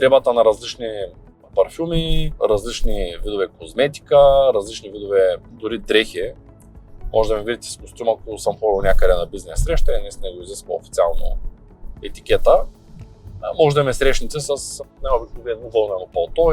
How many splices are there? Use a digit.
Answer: 0